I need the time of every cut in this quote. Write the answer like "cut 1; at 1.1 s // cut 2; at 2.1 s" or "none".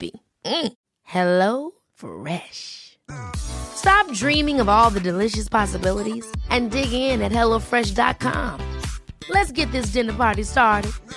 none